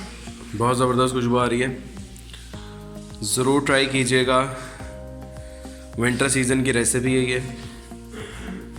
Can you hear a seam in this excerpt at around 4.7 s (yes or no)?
no